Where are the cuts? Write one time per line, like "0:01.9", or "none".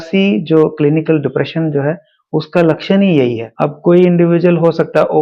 0:03.4